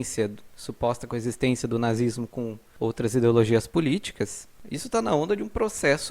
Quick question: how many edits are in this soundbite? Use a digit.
1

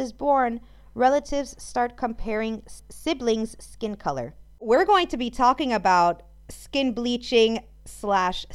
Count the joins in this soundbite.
2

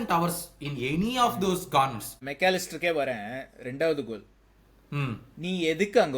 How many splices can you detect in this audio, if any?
1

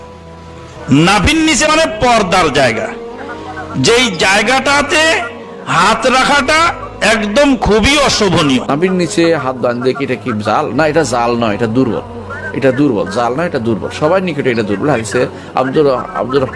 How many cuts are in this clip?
0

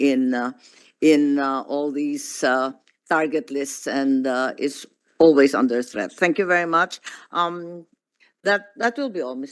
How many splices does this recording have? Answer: 0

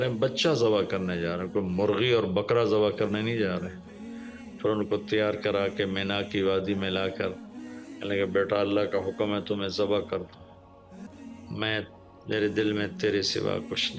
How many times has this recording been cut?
1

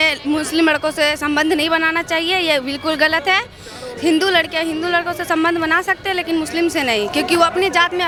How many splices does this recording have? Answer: 0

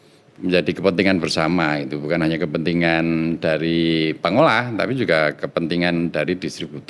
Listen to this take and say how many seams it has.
0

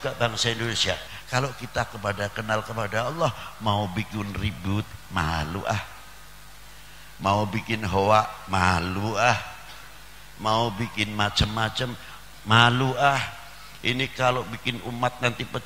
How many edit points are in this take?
1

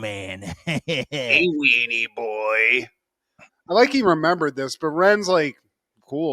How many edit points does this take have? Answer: 0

